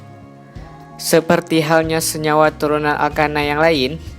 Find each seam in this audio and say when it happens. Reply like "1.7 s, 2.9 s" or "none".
1.1 s